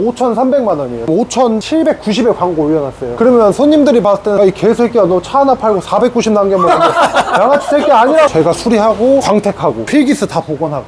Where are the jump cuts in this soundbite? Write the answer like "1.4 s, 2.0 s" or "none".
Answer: 1.1 s, 4.4 s, 8.3 s